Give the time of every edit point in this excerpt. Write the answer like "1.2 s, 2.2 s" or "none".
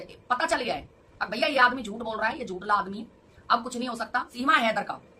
4.3 s